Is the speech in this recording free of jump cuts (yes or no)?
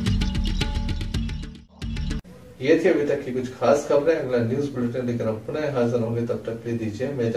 yes